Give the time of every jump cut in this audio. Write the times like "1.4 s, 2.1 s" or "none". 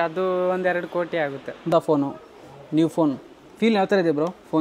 1.7 s